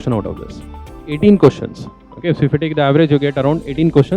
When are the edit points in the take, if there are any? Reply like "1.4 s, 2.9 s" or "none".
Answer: 1.1 s